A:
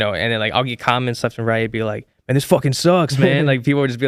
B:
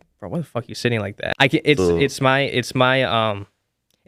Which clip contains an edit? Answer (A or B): B